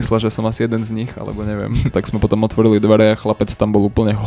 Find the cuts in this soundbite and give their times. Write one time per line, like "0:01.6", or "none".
0:02.0